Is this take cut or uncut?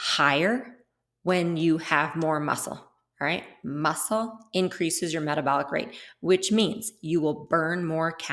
uncut